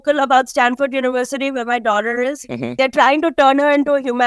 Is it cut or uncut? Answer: cut